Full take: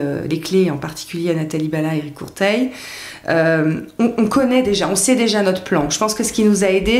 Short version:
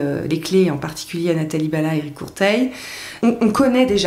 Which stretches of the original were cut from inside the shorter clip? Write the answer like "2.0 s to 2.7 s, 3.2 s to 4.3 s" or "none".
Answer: 3.1 s to 3.9 s